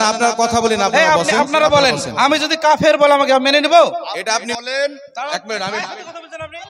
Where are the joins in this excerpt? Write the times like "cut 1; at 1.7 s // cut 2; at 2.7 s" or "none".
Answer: cut 1; at 4.5 s